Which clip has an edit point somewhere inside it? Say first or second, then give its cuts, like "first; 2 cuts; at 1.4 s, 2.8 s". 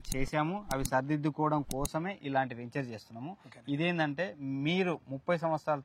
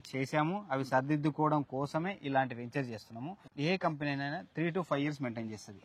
second; 1 cut; at 3.5 s